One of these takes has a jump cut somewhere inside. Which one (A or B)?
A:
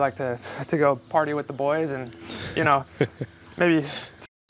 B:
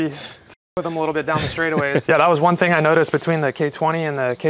B